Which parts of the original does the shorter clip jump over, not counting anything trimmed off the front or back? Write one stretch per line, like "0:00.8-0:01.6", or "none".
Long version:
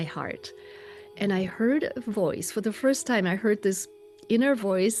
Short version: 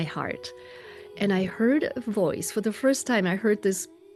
none

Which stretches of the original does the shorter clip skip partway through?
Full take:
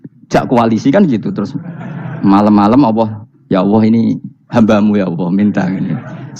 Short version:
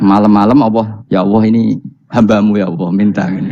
0:03.2-0:03.4

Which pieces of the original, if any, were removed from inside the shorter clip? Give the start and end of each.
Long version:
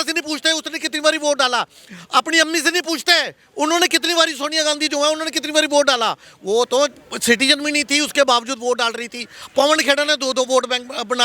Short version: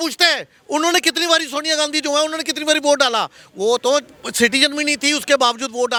none

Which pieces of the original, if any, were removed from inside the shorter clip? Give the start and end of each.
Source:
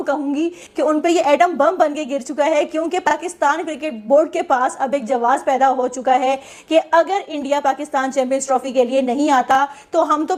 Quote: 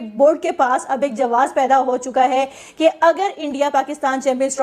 none

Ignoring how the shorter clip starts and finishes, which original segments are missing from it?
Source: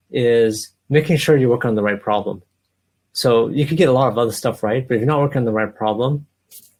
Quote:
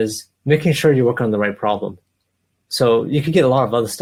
none

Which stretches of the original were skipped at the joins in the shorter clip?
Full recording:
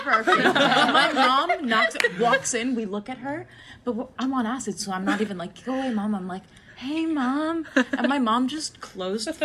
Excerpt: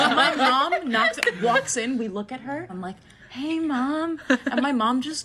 0:03.7-0:06.3

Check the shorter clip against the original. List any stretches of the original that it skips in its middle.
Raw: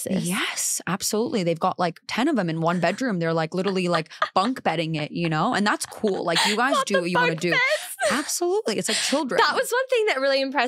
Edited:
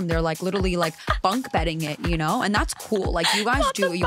none

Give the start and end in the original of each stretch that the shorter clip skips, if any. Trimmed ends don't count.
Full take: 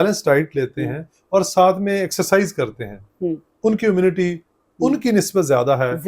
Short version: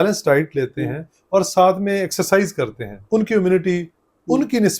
0:02.9-0:03.5

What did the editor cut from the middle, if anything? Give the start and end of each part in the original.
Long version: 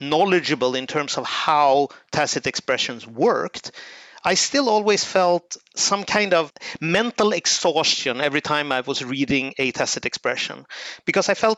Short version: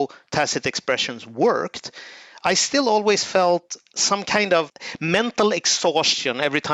none

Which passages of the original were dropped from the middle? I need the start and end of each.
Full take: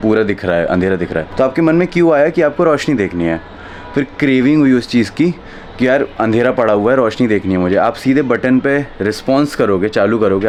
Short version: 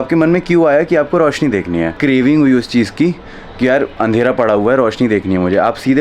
0:03.4-0:04.1

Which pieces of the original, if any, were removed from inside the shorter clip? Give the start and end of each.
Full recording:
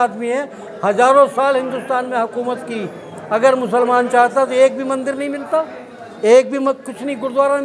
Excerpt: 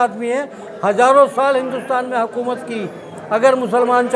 none

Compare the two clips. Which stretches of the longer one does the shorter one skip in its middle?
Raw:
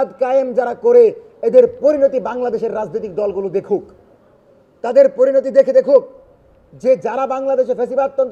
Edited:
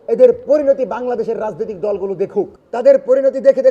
0:03.9-0:04.7

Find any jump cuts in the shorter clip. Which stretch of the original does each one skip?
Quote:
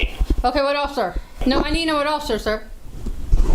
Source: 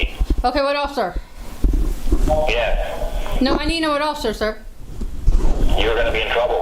0:01.3-0:03.2

